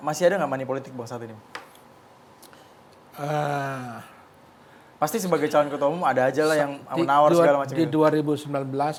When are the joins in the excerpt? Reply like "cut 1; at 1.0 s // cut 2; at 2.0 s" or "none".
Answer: none